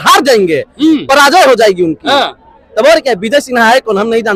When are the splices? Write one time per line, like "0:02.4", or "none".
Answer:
none